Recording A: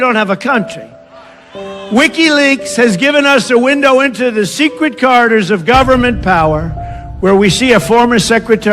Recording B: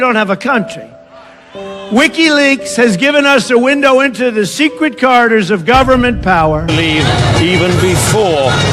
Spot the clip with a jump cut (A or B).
A